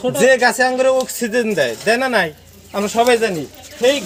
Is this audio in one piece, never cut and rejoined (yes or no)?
yes